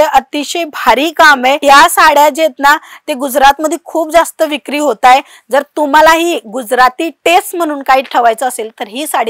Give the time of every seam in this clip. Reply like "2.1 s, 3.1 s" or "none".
none